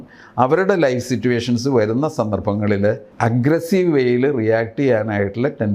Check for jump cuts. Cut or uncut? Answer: cut